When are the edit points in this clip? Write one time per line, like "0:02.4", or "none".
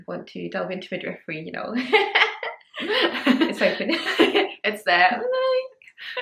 none

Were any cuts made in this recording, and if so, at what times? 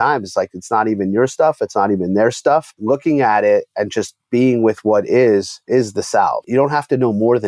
0:02.7
0:05.6
0:06.4

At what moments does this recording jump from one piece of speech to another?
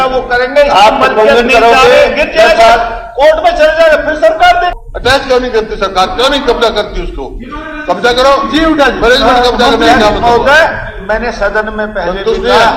0:04.7

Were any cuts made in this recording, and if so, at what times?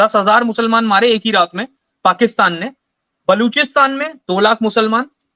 none

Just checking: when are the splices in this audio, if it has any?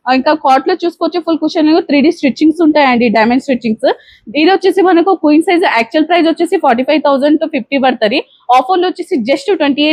none

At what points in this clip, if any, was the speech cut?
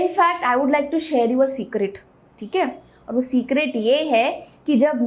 none

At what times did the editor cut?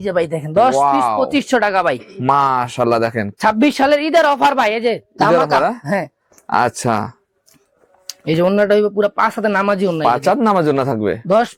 none

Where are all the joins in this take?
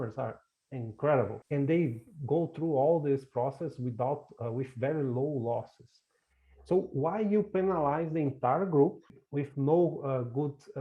0:01.4
0:09.2

